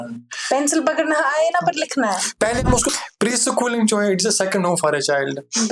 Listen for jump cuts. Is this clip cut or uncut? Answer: cut